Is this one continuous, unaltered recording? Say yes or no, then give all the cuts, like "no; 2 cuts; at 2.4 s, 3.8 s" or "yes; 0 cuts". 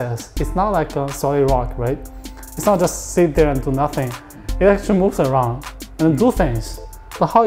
yes; 0 cuts